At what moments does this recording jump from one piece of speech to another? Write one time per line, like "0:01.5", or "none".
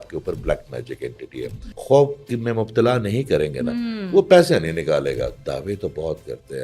0:01.6
0:05.4